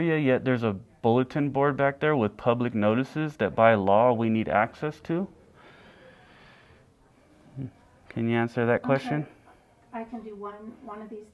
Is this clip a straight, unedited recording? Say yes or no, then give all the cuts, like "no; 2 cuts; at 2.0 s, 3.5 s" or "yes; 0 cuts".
yes; 0 cuts